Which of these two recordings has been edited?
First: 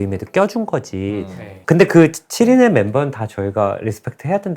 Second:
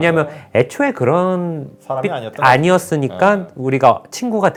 first; 1 cut; at 1.5 s

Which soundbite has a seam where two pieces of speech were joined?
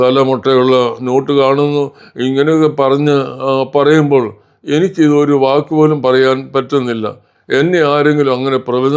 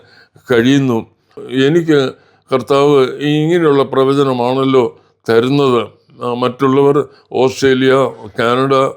second; 1 cut; at 1.3 s

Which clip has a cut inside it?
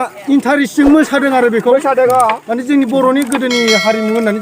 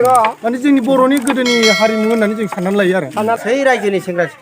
second; 1 cut; at 3.4 s

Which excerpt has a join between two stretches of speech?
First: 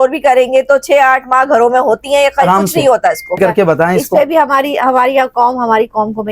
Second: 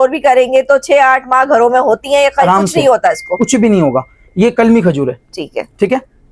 first; 1 cut; at 3.4 s

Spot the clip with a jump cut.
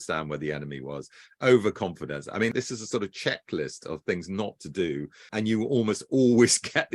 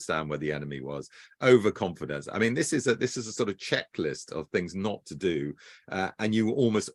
first; 2 cuts; at 2.5 s, 5.3 s

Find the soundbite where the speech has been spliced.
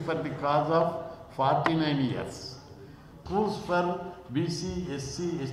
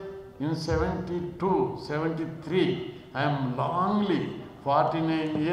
first; 1 cut; at 3.2 s

